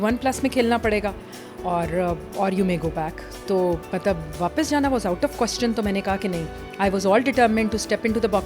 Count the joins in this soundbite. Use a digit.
0